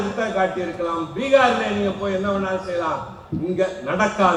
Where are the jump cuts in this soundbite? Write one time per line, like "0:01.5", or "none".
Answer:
none